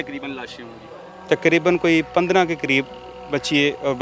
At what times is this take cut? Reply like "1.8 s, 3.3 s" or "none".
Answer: none

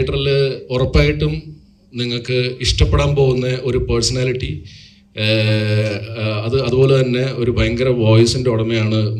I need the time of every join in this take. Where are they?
none

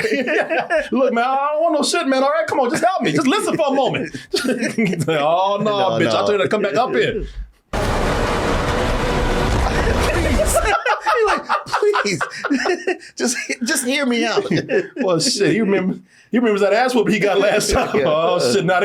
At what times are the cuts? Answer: none

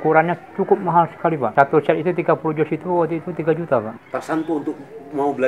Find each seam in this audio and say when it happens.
1.5 s, 4.0 s

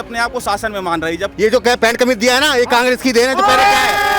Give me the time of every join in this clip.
1.3 s

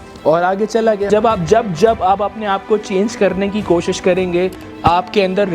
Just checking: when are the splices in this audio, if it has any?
1.1 s

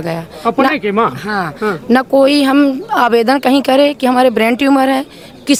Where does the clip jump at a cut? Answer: none

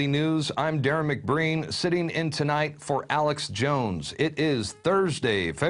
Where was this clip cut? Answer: 4.7 s

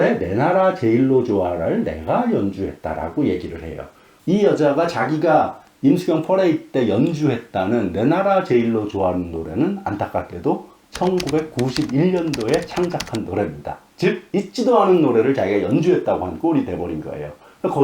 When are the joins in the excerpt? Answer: 4.1 s

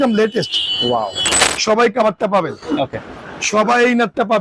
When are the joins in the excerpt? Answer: 1.4 s

